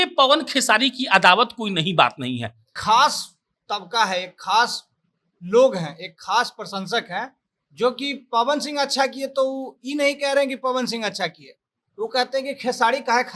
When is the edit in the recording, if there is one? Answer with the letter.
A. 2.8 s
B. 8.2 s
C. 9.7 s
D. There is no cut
A